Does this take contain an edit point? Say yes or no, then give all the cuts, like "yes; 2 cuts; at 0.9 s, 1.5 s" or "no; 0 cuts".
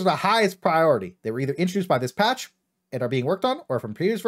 no; 0 cuts